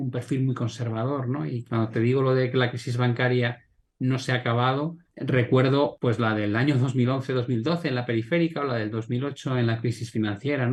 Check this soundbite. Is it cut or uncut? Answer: uncut